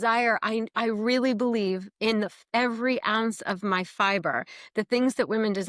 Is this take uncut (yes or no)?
yes